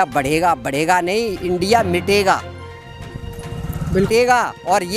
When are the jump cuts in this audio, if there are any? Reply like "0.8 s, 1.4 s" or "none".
4.1 s